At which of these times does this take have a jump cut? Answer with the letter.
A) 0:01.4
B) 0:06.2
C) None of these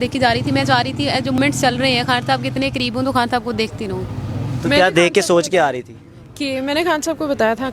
A